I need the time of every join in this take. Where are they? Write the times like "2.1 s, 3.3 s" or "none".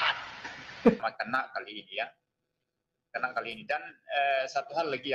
1.0 s